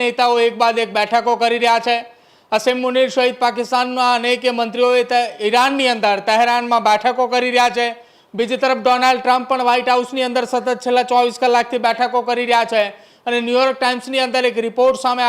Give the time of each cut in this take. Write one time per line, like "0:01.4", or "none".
none